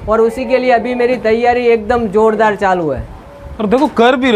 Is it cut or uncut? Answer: uncut